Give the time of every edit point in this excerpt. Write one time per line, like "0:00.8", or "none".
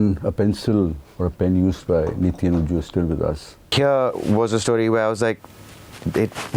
0:03.7